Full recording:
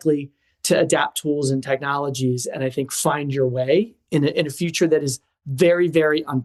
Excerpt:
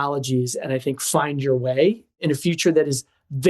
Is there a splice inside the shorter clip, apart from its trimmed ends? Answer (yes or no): yes